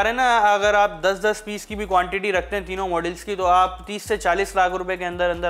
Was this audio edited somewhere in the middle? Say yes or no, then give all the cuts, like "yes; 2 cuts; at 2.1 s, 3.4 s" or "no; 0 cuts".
no; 0 cuts